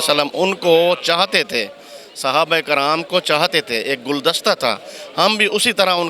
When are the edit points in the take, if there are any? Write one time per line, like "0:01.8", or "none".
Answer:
none